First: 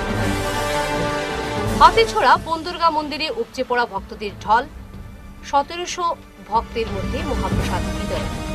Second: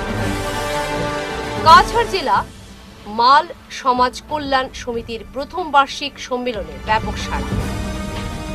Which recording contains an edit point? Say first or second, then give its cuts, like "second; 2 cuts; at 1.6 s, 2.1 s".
second; 1 cut; at 0.9 s